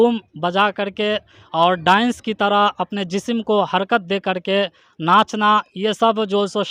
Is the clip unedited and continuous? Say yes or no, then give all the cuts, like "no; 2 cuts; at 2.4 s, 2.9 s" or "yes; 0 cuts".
yes; 0 cuts